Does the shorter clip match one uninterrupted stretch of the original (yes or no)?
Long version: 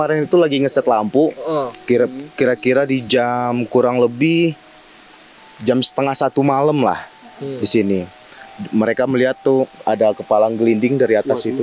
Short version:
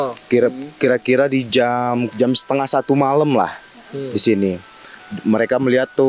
no